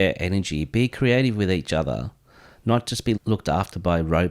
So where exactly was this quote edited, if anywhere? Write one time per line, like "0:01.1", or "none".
0:03.2